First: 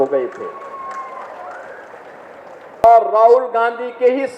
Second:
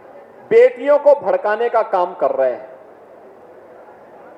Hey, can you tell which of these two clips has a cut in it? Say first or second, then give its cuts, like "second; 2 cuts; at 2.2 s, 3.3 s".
first; 1 cut; at 2.8 s